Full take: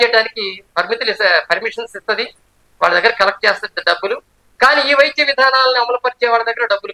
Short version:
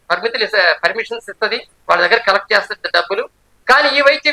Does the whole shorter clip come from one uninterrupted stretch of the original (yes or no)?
no